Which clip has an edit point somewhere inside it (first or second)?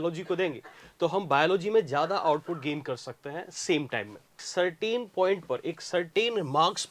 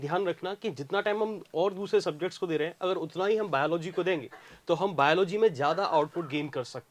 first